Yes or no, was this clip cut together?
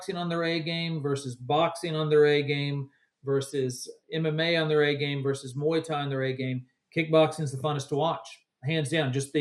no